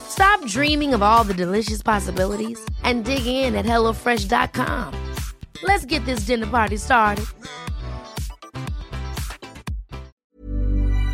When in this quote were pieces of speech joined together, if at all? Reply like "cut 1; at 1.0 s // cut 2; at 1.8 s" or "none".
cut 1; at 10.1 s